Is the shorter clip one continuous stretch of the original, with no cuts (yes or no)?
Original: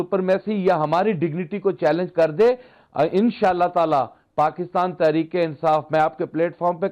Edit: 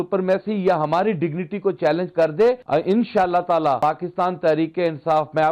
no